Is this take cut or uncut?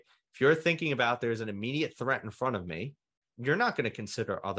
cut